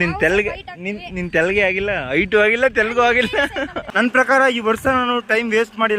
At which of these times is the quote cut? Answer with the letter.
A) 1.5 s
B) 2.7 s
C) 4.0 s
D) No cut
C